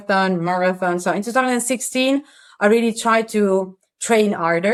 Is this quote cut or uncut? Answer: uncut